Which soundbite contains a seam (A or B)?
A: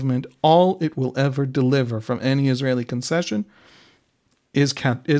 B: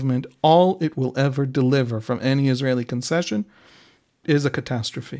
B